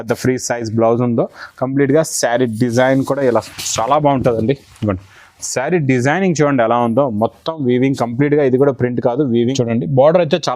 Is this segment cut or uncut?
cut